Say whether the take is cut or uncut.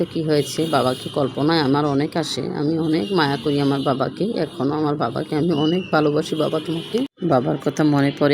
cut